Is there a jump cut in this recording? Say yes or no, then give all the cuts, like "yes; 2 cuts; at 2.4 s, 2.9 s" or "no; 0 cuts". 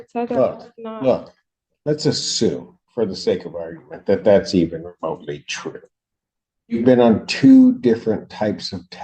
no; 0 cuts